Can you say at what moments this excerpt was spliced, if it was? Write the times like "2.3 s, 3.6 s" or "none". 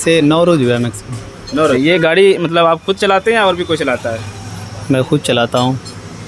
1.8 s